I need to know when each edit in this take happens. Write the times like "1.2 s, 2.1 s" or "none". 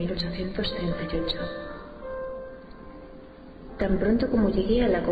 none

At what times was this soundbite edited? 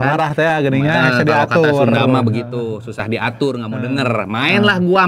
none

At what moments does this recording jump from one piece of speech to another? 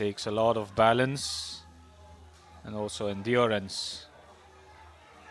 none

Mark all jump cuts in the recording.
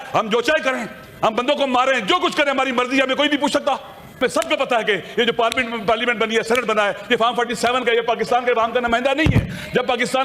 4.2 s

